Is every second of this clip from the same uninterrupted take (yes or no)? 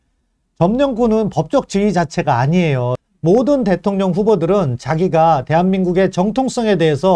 no